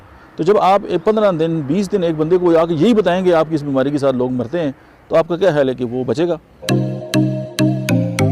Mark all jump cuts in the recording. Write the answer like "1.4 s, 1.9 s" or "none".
6.5 s